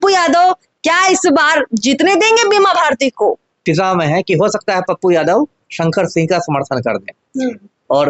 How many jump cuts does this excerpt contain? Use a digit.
1